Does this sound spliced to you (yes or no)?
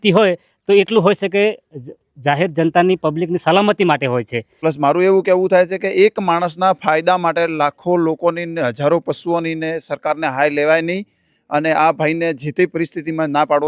yes